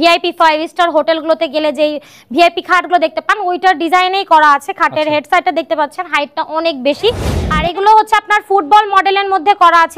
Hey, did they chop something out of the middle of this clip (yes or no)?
yes